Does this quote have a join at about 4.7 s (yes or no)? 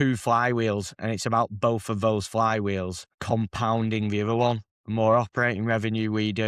yes